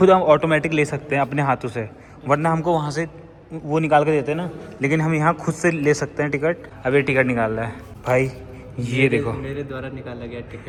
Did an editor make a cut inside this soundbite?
no; 0 cuts

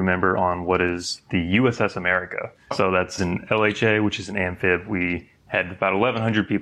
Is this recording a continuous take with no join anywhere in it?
no; 1 cut; at 2.7 s

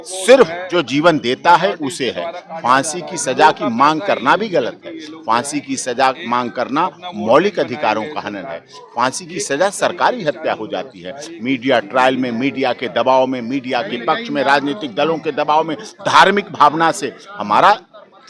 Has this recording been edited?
no; 0 cuts

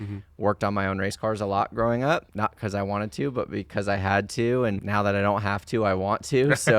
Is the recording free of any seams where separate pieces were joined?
no; 2 cuts; at 2.3 s, 4.8 s

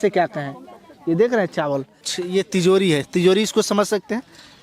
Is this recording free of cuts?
no; 1 cut; at 2.1 s

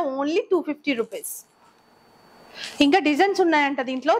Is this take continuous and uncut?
yes; 0 cuts

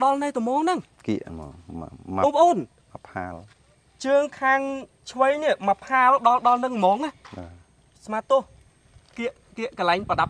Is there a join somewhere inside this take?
no; 0 cuts

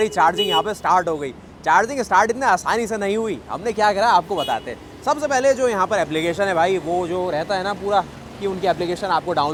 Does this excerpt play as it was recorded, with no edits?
yes; 0 cuts

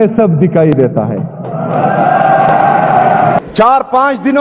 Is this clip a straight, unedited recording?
no; 1 cut; at 3.4 s

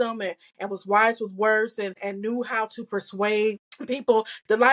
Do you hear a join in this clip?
yes; 2 cuts; at 2.0 s, 3.7 s

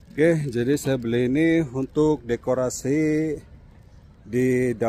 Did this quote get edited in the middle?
no; 0 cuts

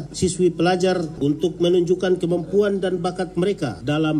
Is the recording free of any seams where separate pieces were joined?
no; 1 cut; at 1.1 s

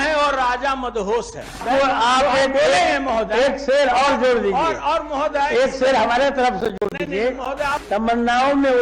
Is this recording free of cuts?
no; 2 cuts; at 1.6 s, 7.8 s

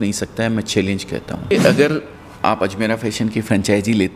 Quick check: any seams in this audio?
yes; 1 cut; at 1.5 s

